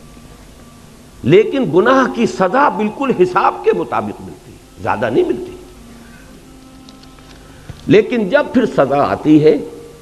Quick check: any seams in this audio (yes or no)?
yes